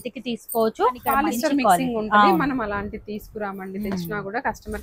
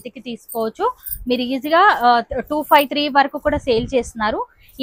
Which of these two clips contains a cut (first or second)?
first